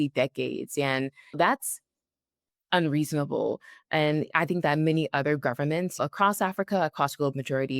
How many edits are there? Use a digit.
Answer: 2